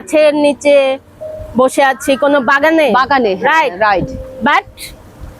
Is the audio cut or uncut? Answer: uncut